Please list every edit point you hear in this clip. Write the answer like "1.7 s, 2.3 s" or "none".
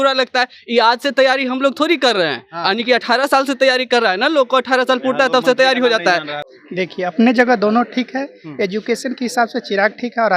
6.4 s